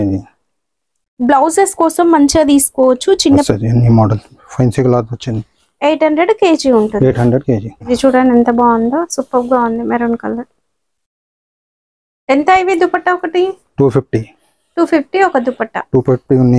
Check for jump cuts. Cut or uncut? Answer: cut